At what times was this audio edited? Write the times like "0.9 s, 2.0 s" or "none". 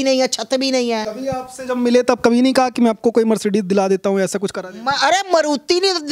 1.1 s